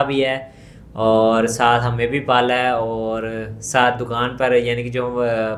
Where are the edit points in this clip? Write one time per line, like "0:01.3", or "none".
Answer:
none